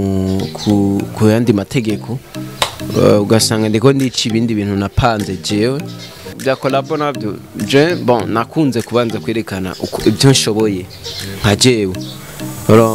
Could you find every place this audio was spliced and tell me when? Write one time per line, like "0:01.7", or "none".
0:06.3